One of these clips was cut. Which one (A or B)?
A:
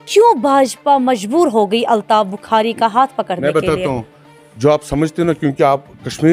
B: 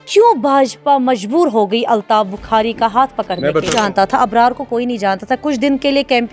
B